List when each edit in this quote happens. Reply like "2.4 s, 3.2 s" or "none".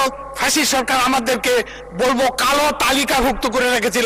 none